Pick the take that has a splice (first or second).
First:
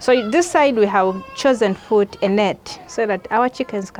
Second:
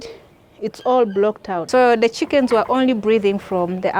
second